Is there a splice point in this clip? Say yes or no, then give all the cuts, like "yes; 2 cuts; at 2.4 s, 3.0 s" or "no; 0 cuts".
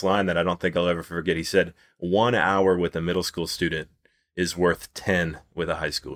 no; 0 cuts